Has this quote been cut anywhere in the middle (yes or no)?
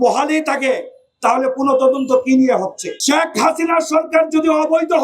yes